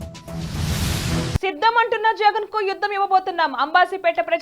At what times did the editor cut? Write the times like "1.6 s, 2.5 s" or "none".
0.9 s